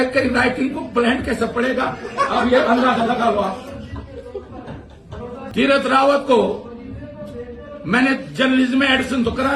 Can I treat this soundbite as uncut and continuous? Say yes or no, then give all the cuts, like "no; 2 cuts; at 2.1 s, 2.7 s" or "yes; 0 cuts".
no; 1 cut; at 5.4 s